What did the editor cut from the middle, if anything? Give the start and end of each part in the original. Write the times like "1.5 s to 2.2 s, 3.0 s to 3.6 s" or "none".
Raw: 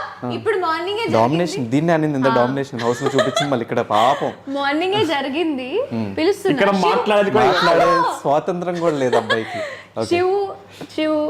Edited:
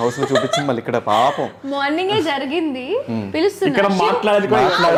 none